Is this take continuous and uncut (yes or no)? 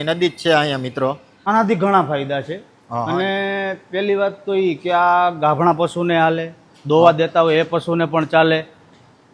no